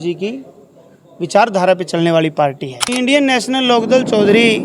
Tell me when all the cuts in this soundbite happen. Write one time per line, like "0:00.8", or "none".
0:02.9